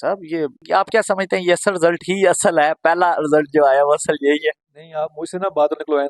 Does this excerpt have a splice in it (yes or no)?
no